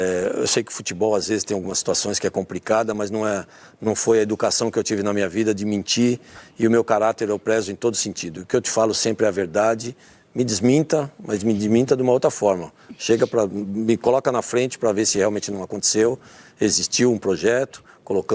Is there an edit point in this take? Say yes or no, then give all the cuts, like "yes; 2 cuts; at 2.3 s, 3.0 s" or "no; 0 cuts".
no; 0 cuts